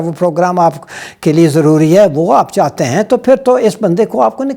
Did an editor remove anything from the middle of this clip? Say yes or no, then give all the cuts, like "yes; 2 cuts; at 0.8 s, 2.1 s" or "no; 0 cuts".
no; 0 cuts